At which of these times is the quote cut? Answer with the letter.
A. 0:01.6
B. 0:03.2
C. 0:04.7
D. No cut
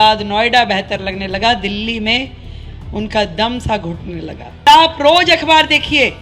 C